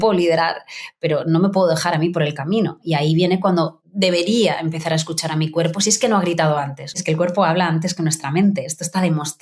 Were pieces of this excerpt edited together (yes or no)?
yes